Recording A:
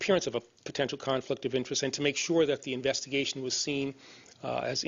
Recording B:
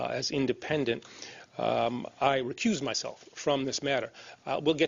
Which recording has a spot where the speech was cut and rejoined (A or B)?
A